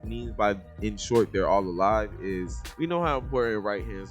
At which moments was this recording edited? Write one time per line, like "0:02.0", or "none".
0:02.6